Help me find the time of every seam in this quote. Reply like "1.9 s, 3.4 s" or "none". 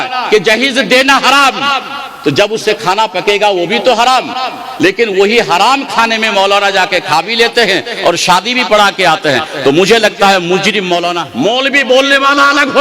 11.2 s

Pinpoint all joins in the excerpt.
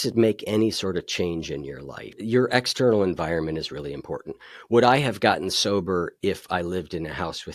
2.1 s

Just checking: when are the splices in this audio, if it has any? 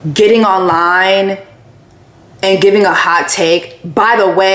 none

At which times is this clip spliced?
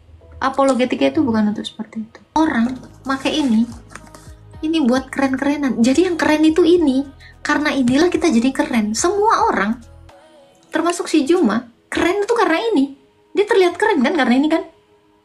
2.4 s

